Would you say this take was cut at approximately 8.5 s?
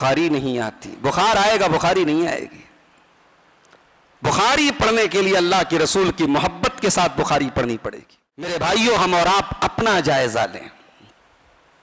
yes; 1 cut; at 8.5 s

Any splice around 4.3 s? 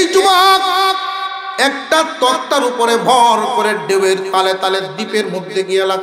no; 0 cuts

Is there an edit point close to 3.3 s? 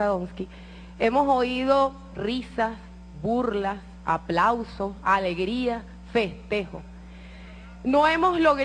yes; 1 cut; at 3.3 s

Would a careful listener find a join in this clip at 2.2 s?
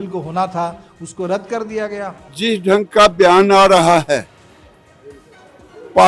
yes; 1 cut; at 2.2 s

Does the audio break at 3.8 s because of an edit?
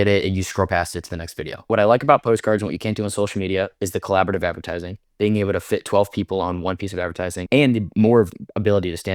no; 1 cut; at 1.7 s

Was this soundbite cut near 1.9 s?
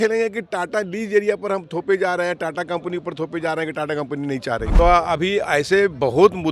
no; 1 cut; at 4.7 s

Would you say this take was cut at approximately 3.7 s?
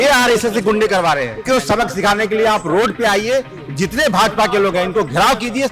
no; 1 cut; at 1.4 s

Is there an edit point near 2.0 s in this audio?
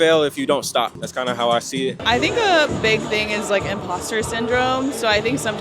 yes; 1 cut; at 2.0 s

